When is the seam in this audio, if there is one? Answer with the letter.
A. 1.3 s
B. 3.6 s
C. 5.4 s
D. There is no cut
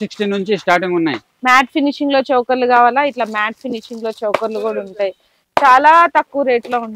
A